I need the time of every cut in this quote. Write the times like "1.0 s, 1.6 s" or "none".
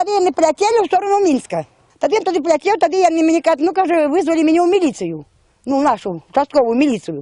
2.1 s

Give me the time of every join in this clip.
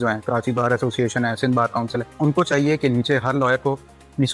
2.1 s

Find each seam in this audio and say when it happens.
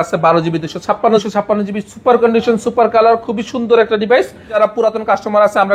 1.2 s, 4.5 s

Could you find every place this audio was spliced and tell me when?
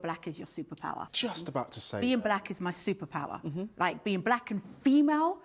1.1 s

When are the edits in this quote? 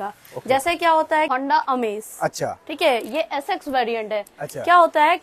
1.3 s

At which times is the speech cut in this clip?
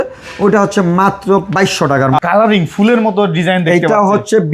2.2 s

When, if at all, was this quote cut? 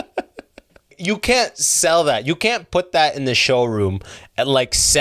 1.0 s

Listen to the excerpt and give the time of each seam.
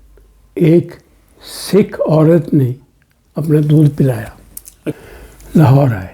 5.0 s

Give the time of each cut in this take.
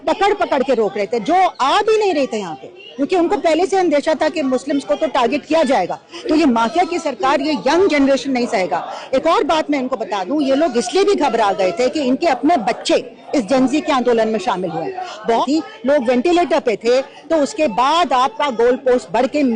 6.0 s, 15.4 s

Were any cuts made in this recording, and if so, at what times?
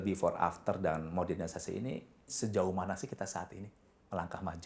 2.3 s

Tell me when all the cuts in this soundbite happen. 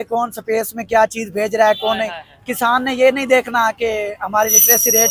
none

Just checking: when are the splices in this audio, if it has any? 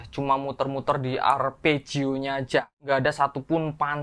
2.8 s

